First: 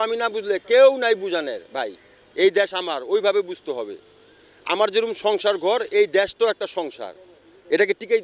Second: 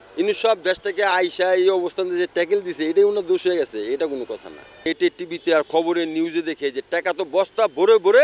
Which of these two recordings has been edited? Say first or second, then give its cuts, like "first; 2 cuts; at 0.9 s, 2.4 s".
second; 1 cut; at 4.9 s